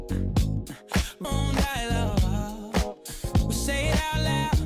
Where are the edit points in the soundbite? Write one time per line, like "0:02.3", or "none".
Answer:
0:01.2